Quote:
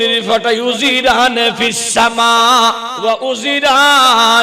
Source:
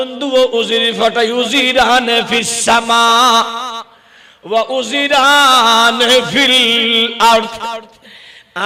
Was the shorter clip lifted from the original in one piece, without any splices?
no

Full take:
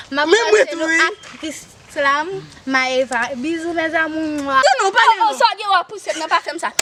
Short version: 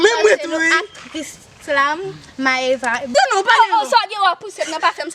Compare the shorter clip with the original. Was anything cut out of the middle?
yes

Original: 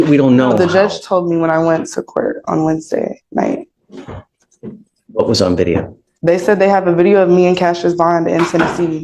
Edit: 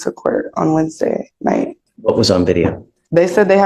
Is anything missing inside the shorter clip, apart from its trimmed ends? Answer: yes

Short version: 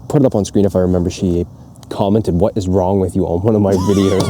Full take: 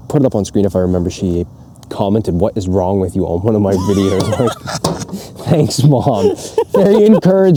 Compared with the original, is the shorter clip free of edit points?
yes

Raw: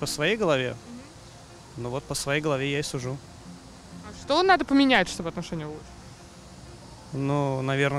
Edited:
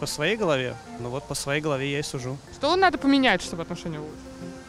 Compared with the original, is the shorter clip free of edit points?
no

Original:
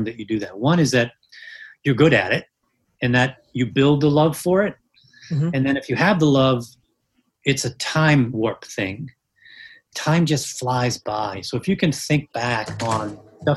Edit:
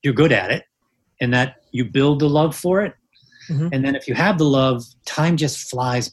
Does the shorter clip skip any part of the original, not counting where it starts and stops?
yes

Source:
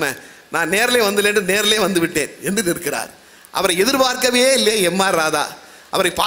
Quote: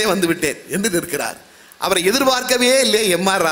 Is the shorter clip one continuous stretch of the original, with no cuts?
yes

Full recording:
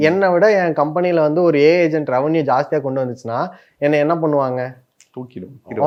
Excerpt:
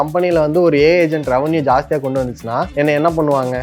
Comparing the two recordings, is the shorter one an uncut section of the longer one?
no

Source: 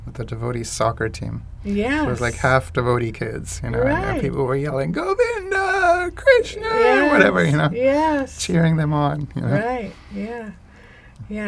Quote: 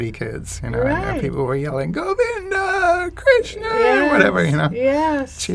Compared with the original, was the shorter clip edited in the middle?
no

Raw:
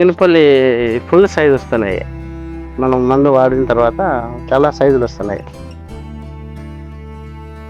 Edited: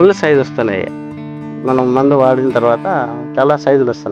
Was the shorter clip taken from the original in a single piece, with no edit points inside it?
yes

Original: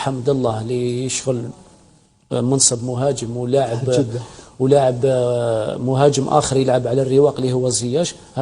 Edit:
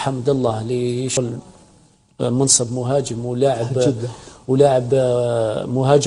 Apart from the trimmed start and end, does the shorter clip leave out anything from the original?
yes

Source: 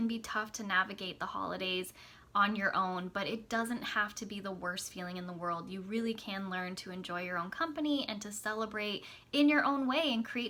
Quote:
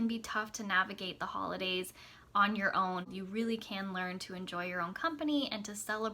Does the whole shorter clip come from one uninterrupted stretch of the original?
no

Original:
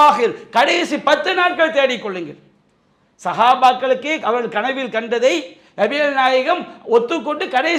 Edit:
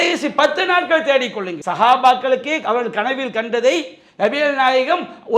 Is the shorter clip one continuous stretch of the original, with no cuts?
no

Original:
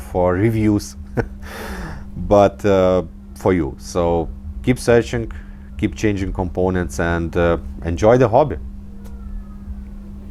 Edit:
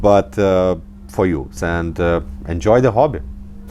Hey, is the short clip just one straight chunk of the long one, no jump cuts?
no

